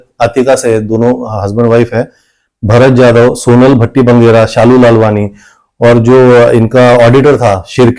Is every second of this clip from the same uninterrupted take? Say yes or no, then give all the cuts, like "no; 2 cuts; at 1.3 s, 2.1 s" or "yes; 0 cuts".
yes; 0 cuts